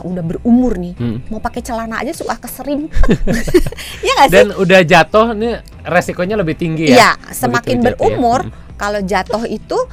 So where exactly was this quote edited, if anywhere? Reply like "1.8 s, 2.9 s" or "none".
none